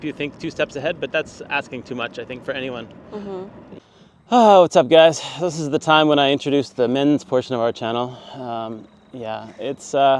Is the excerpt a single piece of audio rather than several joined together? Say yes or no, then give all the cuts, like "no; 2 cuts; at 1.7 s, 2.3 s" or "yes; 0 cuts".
no; 1 cut; at 3.7 s